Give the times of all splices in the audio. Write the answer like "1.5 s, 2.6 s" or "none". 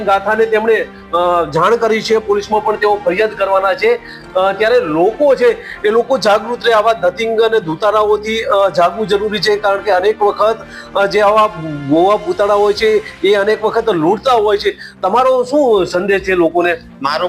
none